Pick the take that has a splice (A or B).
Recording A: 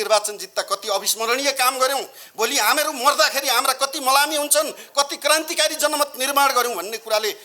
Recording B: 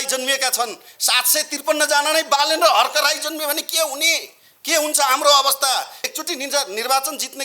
B